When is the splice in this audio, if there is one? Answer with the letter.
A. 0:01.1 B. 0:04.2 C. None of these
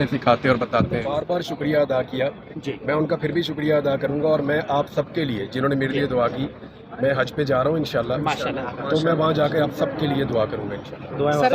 A